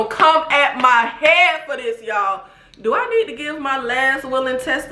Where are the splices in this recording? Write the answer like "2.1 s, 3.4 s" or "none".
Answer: none